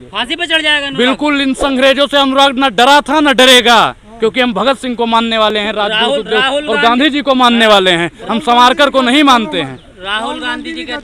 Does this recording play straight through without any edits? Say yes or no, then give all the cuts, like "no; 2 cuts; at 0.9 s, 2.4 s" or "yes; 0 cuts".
yes; 0 cuts